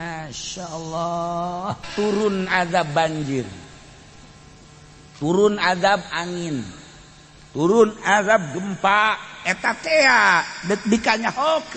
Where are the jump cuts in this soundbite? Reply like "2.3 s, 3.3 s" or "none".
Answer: 1.8 s

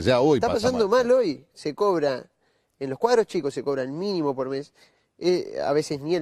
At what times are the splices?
2.7 s

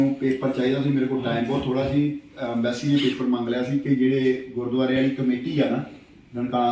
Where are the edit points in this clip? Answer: none

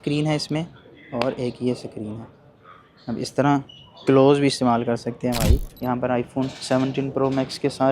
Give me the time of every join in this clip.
5.7 s

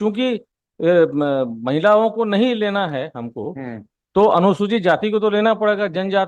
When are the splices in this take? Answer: none

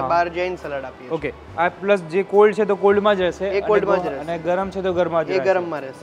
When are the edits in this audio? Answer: none

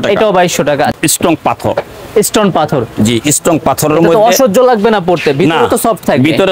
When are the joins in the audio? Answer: 0.9 s

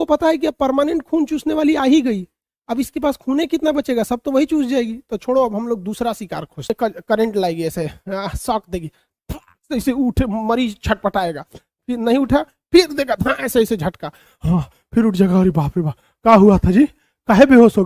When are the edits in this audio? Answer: 6.7 s

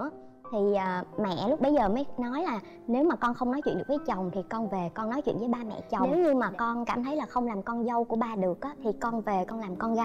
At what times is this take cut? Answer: 6.1 s

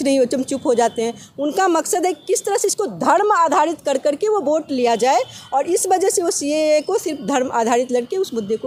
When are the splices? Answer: none

